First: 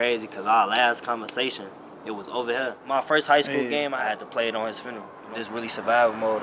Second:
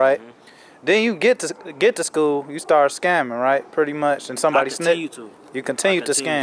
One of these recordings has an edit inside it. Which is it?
first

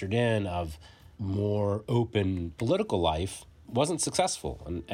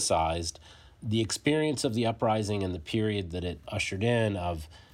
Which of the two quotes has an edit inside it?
first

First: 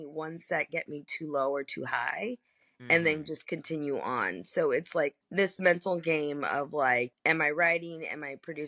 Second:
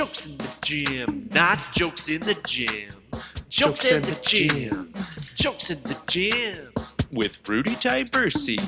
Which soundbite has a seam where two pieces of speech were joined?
first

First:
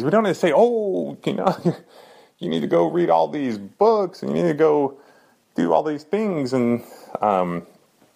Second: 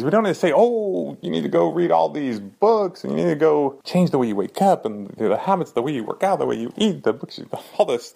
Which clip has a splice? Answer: second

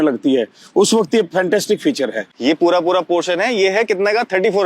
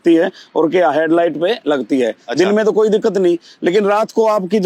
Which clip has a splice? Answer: first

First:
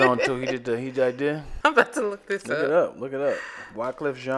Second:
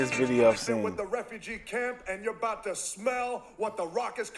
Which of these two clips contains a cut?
first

